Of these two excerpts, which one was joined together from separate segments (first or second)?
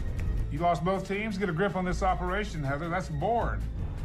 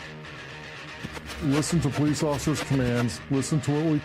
second